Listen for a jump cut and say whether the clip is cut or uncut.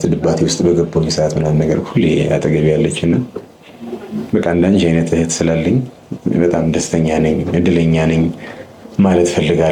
uncut